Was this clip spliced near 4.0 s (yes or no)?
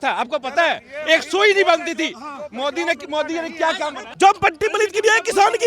yes